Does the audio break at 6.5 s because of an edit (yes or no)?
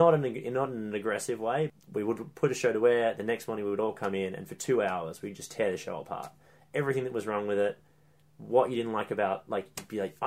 no